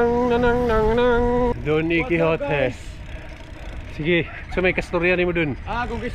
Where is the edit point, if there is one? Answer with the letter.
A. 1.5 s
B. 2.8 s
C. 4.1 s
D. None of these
A